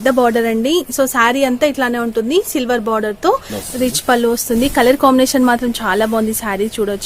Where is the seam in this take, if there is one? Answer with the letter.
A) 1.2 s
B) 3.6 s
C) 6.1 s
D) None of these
B